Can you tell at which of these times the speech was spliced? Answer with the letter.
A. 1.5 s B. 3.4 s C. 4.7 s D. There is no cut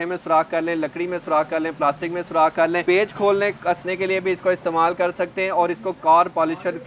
D